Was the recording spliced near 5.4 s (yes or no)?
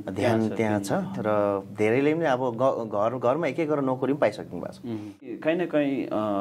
yes